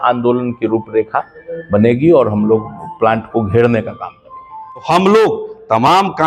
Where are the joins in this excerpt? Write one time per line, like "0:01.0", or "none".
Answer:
0:04.8